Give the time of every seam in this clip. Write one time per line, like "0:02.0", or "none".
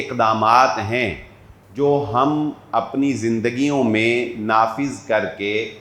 none